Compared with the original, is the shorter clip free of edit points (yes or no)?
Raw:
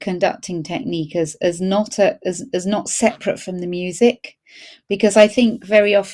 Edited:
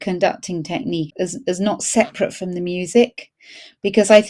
no